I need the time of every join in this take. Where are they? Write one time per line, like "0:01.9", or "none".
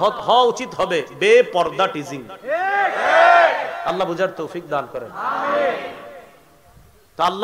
none

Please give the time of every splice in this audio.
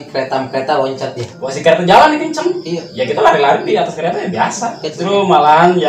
0:01.3
0:04.9

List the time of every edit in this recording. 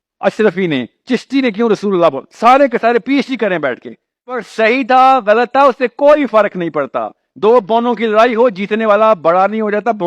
0:04.4

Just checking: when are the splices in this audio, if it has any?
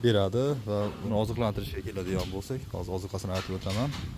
0:01.0

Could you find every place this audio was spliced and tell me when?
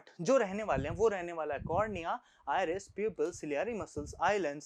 none

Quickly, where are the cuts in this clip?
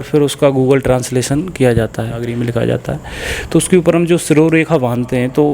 0:02.3

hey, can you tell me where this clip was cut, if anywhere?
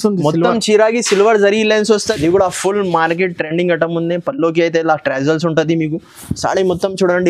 0:02.1

